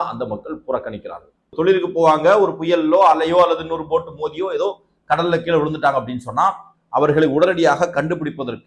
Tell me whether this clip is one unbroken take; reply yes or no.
no